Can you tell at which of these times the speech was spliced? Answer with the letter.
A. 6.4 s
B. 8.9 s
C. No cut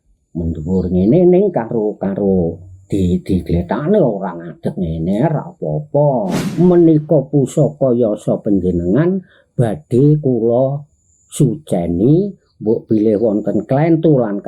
A